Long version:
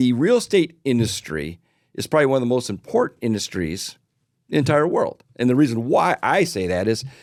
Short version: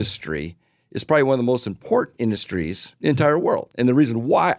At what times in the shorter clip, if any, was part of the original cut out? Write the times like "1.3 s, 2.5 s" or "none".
2.8 s, 3.7 s